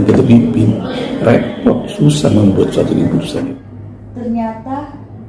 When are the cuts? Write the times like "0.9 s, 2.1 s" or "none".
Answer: 3.4 s